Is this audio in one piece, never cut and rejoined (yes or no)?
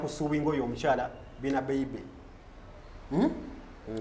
yes